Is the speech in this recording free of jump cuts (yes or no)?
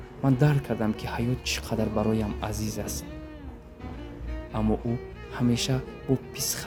yes